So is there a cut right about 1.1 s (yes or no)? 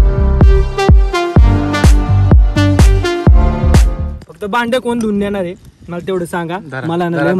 no